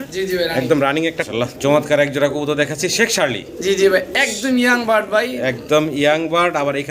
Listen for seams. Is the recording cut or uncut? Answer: cut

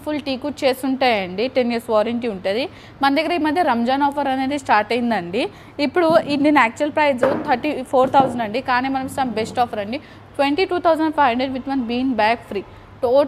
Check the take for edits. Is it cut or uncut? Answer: uncut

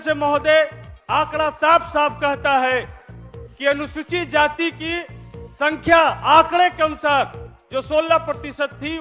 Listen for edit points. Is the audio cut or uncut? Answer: uncut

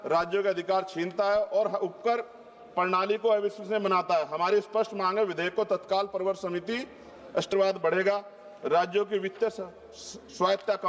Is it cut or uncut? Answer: cut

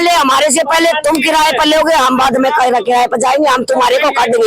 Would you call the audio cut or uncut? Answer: uncut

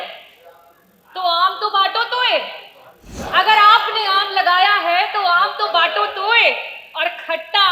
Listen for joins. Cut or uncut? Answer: cut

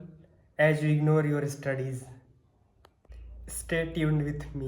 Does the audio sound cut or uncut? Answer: uncut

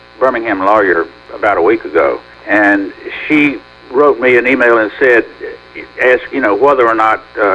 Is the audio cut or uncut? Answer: cut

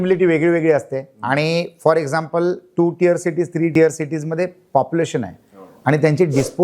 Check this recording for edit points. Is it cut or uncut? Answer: cut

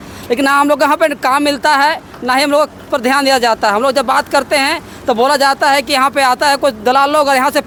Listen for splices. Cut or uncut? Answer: uncut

